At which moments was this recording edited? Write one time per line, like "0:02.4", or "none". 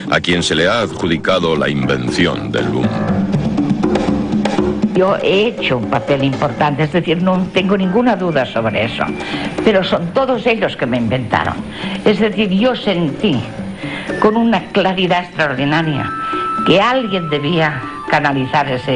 0:14.2